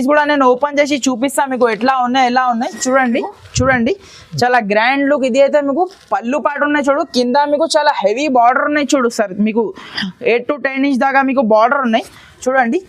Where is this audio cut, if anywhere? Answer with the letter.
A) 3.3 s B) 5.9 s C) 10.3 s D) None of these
A